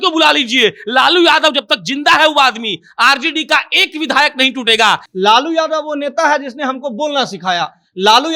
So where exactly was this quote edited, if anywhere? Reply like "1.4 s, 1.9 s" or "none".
5.0 s